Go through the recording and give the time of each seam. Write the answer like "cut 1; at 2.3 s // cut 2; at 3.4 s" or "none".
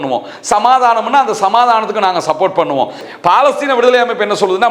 cut 1; at 3.0 s